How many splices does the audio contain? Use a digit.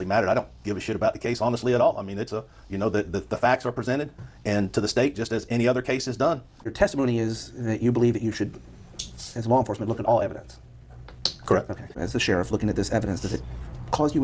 2